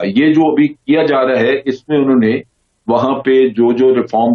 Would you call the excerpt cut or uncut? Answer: uncut